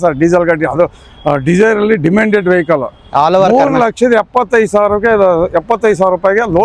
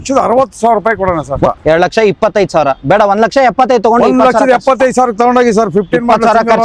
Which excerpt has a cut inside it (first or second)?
second